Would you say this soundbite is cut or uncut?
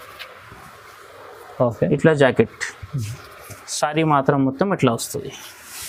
uncut